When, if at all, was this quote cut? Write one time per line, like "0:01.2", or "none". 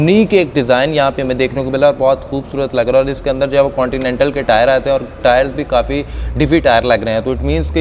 none